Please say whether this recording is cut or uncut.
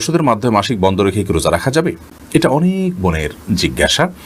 uncut